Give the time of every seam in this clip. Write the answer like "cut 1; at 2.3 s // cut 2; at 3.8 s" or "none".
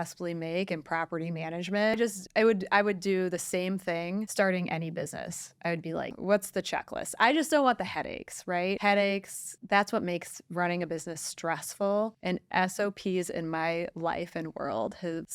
cut 1; at 2.0 s // cut 2; at 6.1 s